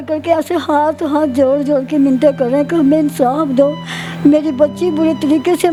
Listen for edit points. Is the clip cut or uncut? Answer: uncut